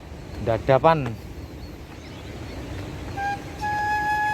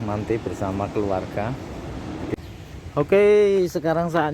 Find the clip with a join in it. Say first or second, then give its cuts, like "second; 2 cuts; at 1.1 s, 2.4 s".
second; 1 cut; at 2.3 s